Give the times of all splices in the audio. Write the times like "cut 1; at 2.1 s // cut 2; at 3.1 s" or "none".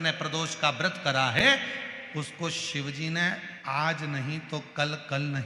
none